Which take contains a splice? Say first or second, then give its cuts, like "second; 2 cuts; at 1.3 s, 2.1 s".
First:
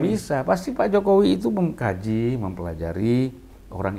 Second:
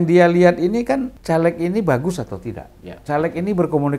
second; 1 cut; at 1.1 s